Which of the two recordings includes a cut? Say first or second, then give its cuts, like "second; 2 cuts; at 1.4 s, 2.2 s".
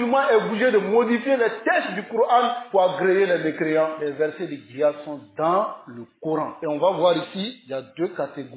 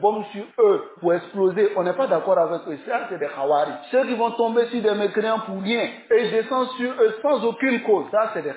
first; 3 cuts; at 2.6 s, 4.0 s, 6.5 s